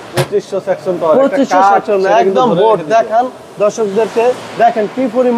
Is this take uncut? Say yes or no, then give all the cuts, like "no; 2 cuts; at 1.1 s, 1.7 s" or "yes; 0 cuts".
yes; 0 cuts